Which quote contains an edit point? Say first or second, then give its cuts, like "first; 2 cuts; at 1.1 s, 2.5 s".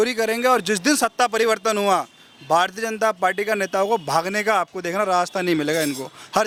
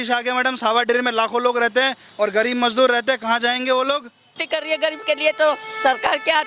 second; 1 cut; at 4.4 s